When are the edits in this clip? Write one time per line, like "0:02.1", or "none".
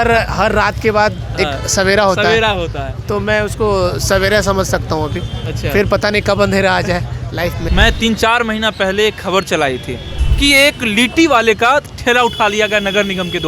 0:07.7
0:10.2